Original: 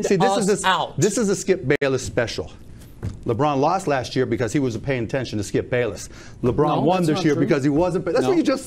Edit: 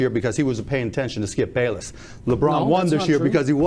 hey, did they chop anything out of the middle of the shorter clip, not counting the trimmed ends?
no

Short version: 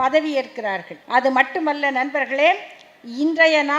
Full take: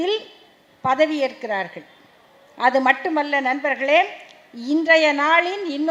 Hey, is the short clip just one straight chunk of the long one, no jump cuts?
no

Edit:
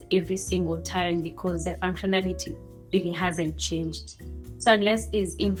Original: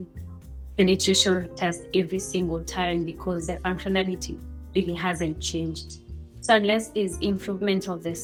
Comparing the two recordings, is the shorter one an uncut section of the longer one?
yes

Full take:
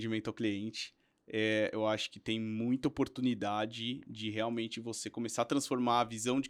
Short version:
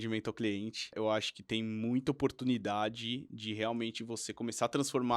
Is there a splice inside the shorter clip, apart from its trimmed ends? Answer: yes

